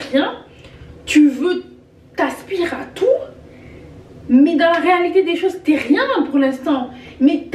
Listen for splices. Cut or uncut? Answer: uncut